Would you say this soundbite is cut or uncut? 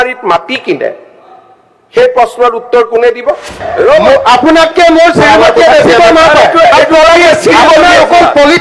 cut